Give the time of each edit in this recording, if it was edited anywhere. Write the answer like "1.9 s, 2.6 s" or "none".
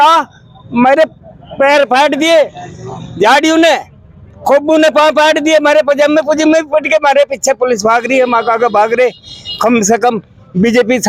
none